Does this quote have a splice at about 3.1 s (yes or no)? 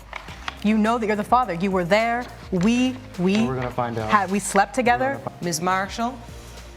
no